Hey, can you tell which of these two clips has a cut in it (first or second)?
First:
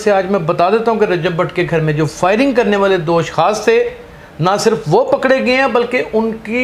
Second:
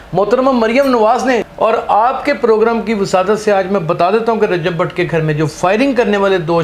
second